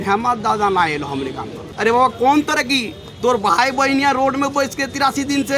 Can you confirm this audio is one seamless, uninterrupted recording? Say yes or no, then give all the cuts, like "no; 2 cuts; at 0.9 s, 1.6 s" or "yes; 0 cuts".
no; 1 cut; at 1.6 s